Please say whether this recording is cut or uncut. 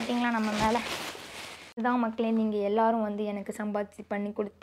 cut